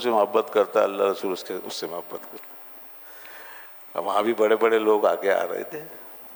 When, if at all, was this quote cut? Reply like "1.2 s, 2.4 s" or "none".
none